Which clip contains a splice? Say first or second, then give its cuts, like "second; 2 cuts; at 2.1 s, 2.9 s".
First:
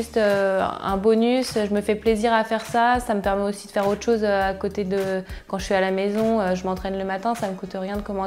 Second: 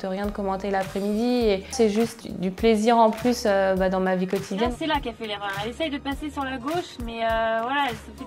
second; 2 cuts; at 2.2 s, 4.7 s